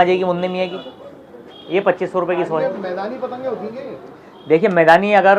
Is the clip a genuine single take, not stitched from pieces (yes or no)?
yes